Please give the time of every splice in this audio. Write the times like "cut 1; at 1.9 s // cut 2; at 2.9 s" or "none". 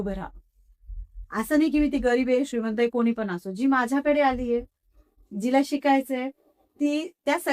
none